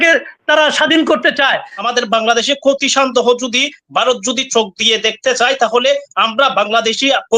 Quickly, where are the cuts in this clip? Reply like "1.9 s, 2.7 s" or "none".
1.8 s